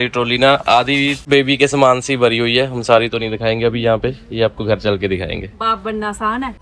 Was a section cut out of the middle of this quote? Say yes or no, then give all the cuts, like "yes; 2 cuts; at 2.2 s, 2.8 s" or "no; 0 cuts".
no; 0 cuts